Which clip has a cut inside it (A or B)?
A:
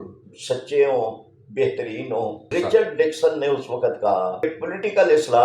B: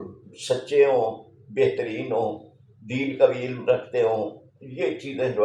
A